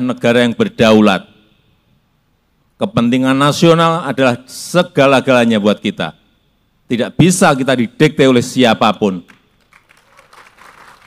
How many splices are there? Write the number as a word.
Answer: zero